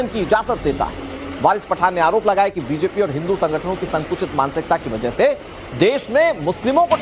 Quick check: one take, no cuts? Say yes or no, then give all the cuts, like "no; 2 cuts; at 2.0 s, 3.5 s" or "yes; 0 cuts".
no; 1 cut; at 3.5 s